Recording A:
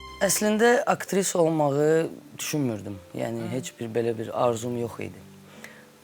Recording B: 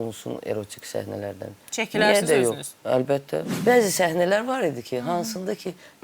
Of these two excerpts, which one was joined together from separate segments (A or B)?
B